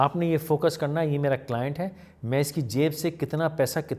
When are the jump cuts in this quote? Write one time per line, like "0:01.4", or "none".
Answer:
none